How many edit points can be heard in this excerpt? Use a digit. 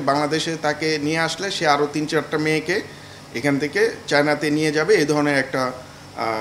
0